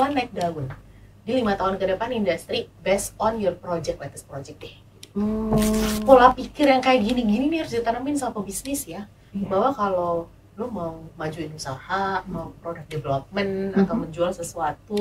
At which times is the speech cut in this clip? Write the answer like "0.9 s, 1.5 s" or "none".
6.0 s

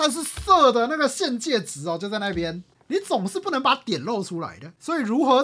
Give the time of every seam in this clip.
2.7 s

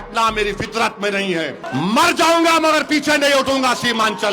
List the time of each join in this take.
1.6 s

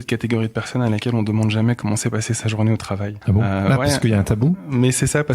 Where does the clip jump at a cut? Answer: 3.1 s

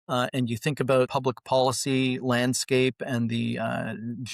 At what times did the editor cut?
1.1 s

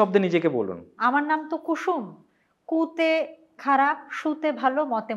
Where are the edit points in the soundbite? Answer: 0.9 s

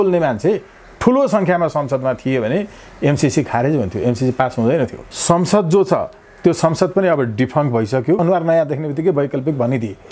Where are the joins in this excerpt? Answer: 5.1 s, 8.2 s

